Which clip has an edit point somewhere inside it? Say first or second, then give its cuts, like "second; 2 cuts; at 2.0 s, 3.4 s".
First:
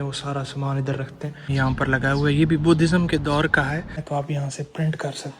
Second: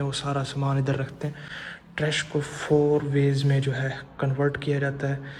first; 2 cuts; at 1.5 s, 4.0 s